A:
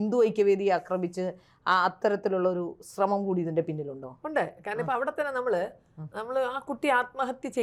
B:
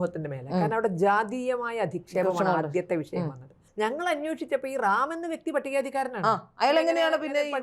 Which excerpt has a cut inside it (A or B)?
B